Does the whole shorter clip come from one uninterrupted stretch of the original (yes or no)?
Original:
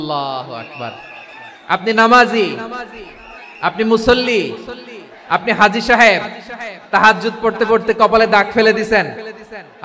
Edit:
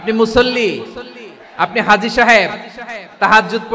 yes